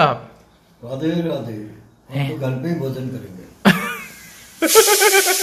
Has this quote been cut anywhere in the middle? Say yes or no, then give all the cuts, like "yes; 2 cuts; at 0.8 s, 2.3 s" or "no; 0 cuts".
no; 0 cuts